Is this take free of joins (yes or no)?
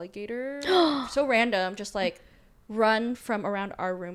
yes